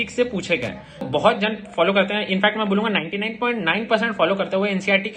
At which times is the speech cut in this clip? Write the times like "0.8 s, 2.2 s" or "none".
1.1 s